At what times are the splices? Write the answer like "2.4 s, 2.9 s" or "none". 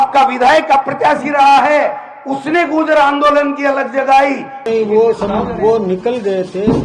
4.6 s